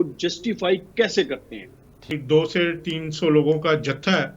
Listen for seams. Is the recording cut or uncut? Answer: cut